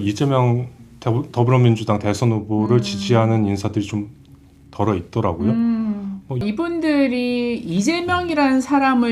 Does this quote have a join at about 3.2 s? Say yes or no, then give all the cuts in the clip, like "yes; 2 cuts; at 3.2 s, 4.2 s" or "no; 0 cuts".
no; 1 cut; at 6.4 s